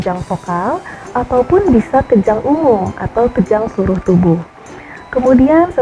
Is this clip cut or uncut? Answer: uncut